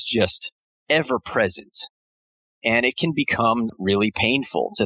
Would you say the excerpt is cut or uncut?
cut